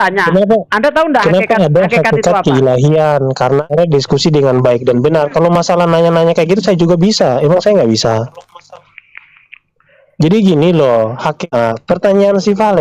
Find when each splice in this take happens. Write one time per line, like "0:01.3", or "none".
0:03.6
0:11.3

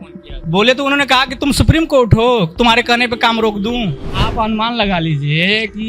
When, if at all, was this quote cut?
0:04.1

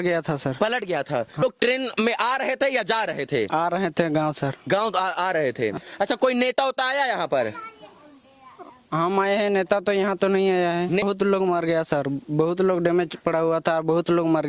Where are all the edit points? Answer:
0:01.4
0:05.8
0:11.0

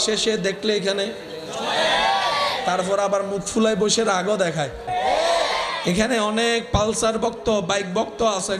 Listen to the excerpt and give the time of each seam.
0:04.9

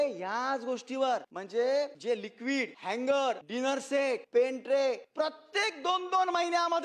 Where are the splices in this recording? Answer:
0:01.4
0:02.3
0:03.9
0:05.0

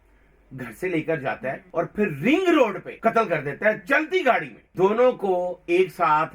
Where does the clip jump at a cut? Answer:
0:01.6
0:02.9
0:04.6

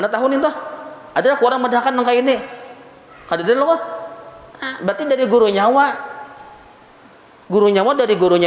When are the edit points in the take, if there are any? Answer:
none

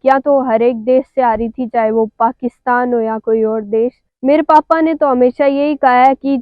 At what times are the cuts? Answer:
0:04.1

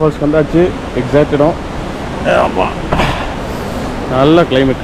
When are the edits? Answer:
0:03.3

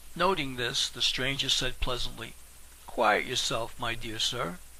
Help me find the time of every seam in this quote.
none

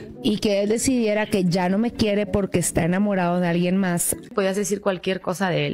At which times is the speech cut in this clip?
0:04.3

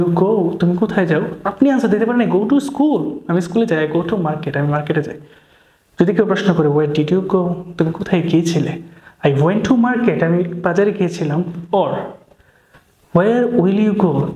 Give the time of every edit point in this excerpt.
none

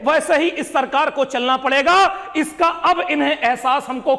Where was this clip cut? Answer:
none

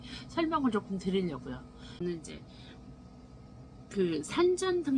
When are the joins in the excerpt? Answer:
0:01.9

